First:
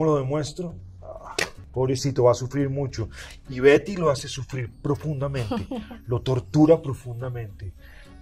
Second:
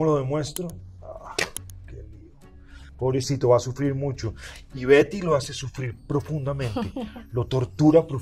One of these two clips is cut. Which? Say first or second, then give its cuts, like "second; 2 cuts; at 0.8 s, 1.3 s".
first; 1 cut; at 1.6 s